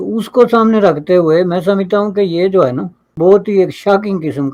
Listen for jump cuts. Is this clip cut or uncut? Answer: uncut